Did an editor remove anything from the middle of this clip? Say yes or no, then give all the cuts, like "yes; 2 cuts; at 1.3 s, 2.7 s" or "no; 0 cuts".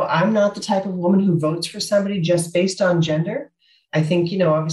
no; 0 cuts